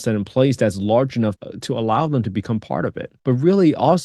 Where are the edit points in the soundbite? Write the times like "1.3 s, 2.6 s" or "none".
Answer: 3.1 s